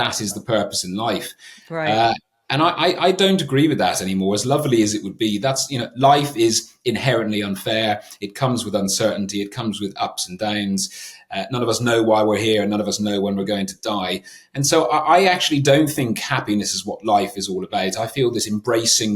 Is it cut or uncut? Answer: uncut